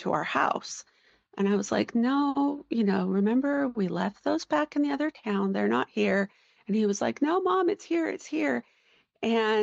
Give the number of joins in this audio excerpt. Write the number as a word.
zero